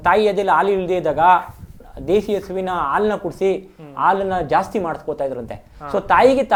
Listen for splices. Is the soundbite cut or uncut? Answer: uncut